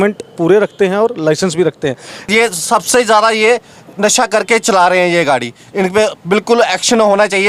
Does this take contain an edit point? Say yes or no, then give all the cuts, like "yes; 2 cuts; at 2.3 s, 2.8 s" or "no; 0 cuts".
yes; 1 cut; at 2.3 s